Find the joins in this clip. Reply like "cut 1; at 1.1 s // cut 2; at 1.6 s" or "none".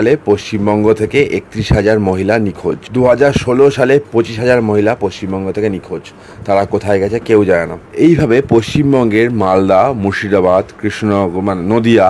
cut 1; at 2.8 s // cut 2; at 7.8 s